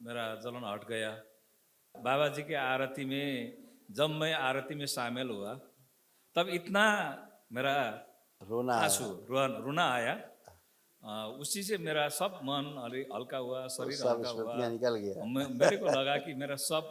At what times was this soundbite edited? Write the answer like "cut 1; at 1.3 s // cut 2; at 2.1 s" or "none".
cut 1; at 1.9 s